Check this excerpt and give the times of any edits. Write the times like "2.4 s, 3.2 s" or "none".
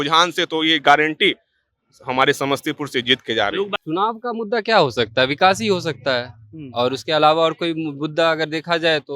3.8 s